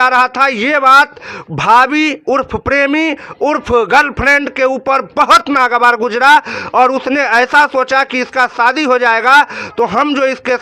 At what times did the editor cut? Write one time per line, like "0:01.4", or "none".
none